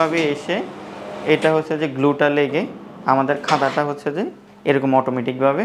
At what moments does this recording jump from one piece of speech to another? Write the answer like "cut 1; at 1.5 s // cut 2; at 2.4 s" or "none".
none